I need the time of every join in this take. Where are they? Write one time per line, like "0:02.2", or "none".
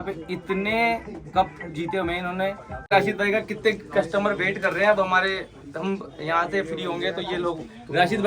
0:02.9